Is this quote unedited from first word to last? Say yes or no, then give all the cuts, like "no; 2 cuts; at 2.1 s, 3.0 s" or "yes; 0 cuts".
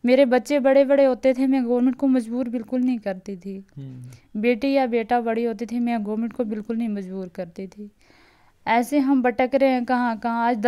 yes; 0 cuts